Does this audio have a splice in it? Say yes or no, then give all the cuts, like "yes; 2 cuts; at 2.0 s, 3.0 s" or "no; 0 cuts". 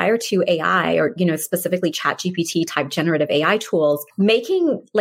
no; 0 cuts